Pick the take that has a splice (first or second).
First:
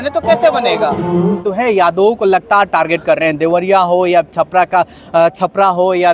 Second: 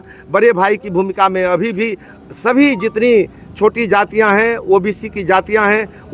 first